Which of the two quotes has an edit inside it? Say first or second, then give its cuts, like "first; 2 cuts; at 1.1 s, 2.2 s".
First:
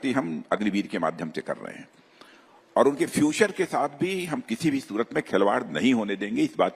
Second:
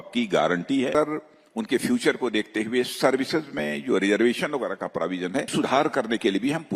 second; 2 cuts; at 1.0 s, 5.5 s